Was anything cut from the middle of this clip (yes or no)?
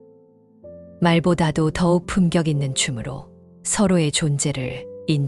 yes